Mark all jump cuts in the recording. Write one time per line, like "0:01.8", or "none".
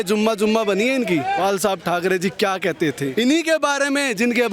0:01.4
0:03.1